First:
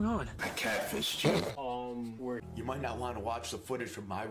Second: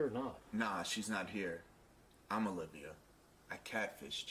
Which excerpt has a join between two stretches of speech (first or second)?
first